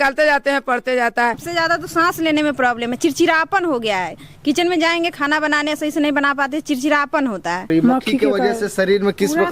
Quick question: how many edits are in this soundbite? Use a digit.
2